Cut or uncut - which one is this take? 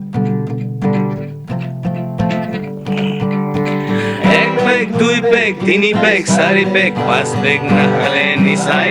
uncut